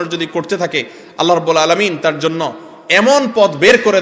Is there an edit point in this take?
no; 0 cuts

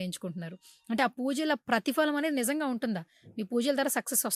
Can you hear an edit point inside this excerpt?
no; 0 cuts

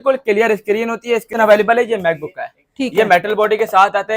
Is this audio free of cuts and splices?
no; 1 cut; at 1.3 s

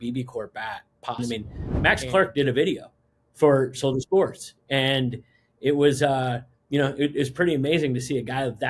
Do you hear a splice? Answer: yes; 1 cut; at 1.2 s

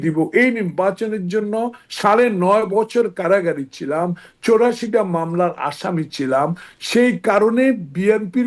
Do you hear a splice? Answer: no; 0 cuts

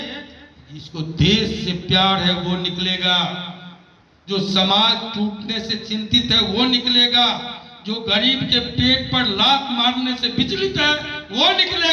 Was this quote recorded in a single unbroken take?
yes; 0 cuts

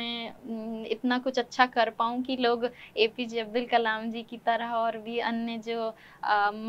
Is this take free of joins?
yes; 0 cuts

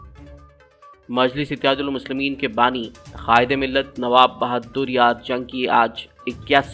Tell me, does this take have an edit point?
yes; 1 cut; at 1.0 s

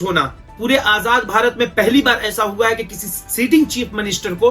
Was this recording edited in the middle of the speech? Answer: no; 0 cuts

